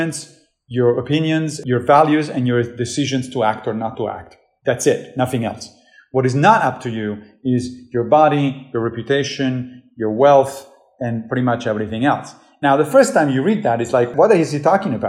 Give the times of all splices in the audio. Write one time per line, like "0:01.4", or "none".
0:01.6
0:14.1